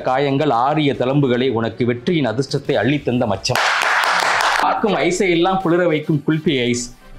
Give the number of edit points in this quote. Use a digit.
1